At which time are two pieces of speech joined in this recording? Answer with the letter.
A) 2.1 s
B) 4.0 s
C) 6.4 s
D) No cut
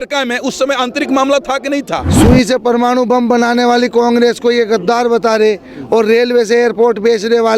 A